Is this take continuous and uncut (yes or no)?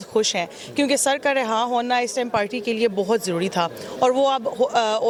yes